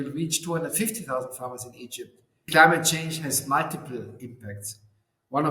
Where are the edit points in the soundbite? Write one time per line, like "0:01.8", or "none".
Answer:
0:02.4